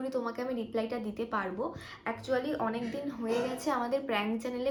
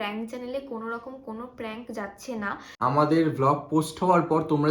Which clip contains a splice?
second; 1 cut; at 2.7 s

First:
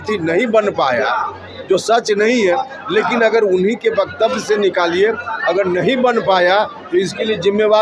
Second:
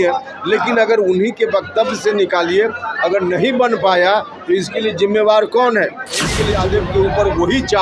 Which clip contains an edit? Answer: second; 1 cut; at 6.5 s

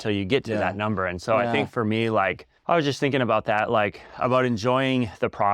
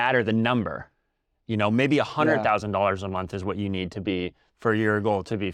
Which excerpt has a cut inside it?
first; 1 cut; at 2.5 s

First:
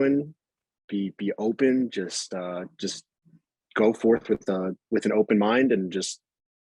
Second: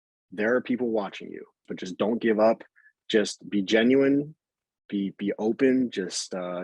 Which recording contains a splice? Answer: second; 1 cut; at 1.7 s

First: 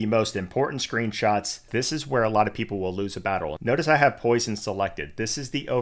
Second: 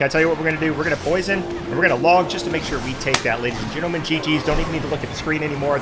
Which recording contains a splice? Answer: first; 2 cuts; at 1.7 s, 3.5 s

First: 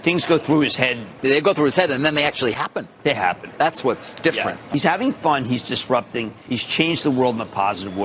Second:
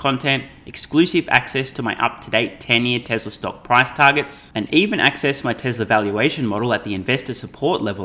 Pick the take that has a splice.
first; 4 cuts; at 1.1 s, 2.9 s, 4.6 s, 6.4 s

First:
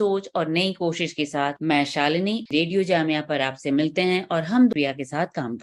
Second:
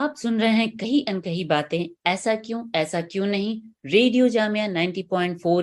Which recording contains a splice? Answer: first; 2 cuts; at 2.5 s, 4.7 s

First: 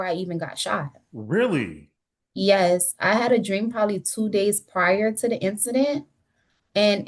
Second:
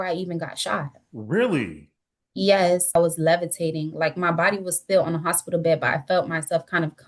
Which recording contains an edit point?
second; 1 cut; at 2.9 s

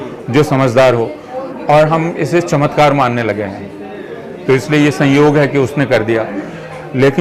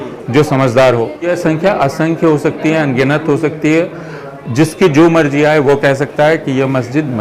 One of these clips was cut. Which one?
second; 1 cut; at 1.3 s

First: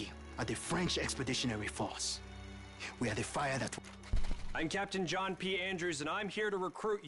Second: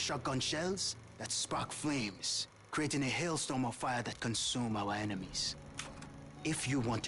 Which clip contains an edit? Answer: first; 2 cuts; at 3.7 s, 5.4 s

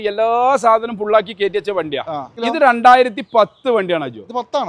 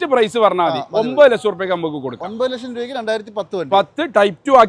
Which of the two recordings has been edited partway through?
first; 1 cut; at 2.3 s

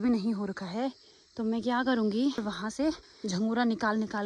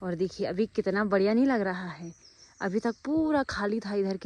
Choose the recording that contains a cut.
first; 1 cut; at 2.8 s

